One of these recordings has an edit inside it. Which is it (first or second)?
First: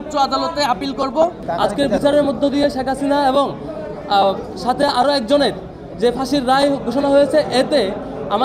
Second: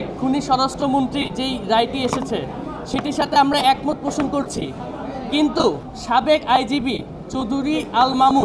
first